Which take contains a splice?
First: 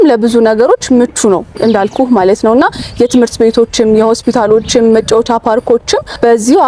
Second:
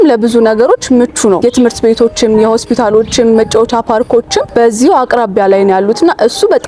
second; 2 cuts; at 1.4 s, 4.5 s

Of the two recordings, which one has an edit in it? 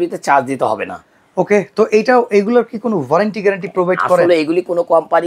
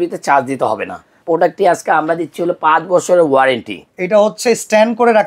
second; 2 cuts; at 1.2 s, 3.8 s

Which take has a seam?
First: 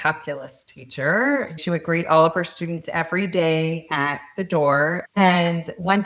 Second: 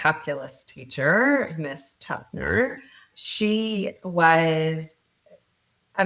first; 2 cuts; at 1.6 s, 5.0 s

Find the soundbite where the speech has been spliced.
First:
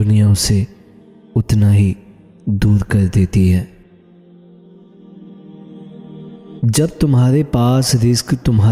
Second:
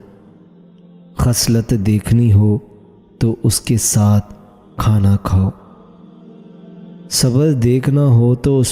second; 2 cuts; at 5.7 s, 7.1 s

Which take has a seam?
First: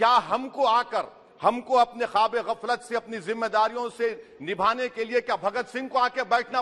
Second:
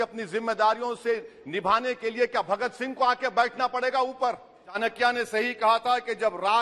second; 1 cut; at 4.8 s

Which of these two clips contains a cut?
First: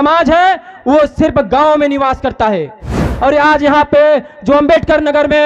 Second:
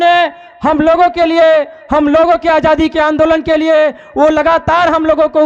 first; 1 cut; at 3.1 s

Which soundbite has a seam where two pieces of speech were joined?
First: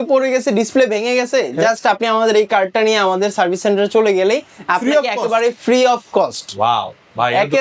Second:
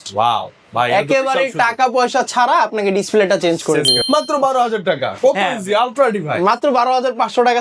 second; 1 cut; at 4.0 s

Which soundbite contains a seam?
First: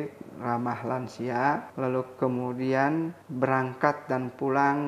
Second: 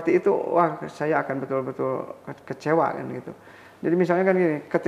first; 2 cuts; at 1.7 s, 3.2 s

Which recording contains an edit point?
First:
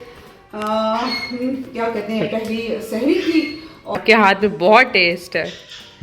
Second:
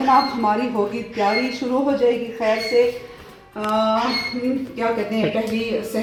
first; 1 cut; at 4.0 s

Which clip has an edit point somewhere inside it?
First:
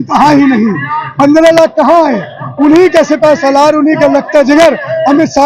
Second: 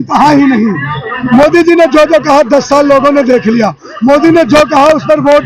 second; 1 cut; at 1.2 s

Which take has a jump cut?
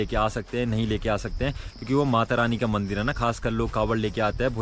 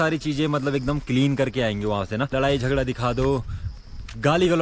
second; 1 cut; at 2.3 s

